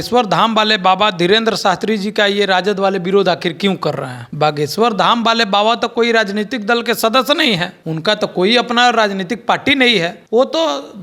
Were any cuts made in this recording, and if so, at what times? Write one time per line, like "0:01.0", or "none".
none